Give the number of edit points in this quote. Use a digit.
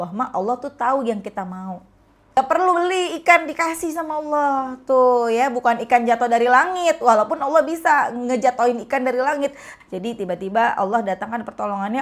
2